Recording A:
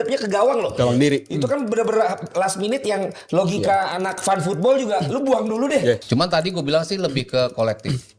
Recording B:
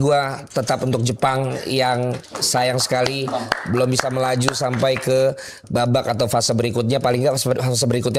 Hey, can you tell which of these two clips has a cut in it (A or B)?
A